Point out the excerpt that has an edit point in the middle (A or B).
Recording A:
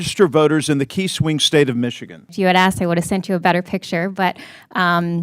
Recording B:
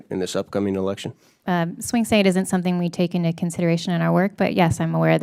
A